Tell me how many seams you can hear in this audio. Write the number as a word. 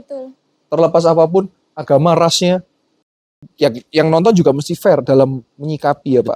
one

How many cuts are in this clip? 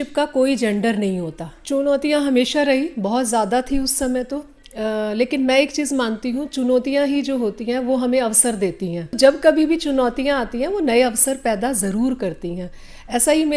two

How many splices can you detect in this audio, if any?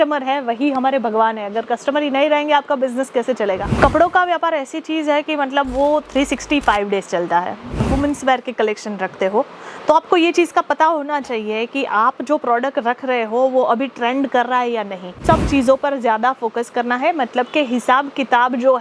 three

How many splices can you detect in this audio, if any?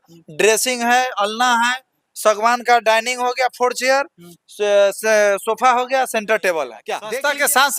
one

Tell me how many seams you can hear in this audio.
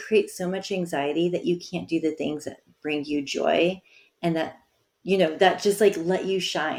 zero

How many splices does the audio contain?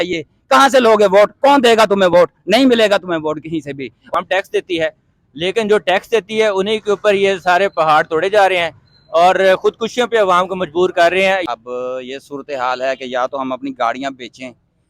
two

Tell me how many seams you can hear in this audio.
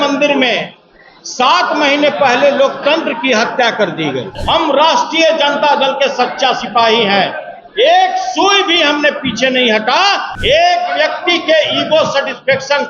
two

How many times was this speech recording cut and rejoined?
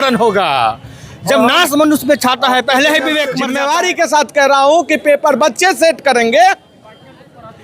one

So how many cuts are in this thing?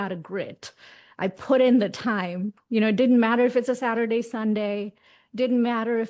zero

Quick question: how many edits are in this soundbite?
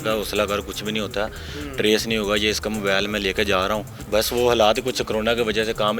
one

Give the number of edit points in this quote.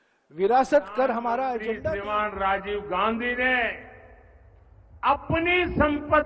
one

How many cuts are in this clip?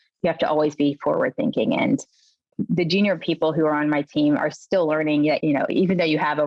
two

